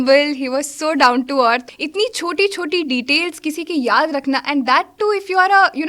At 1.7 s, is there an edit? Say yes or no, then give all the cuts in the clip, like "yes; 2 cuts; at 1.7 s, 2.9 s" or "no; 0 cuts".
yes; 1 cut; at 1.7 s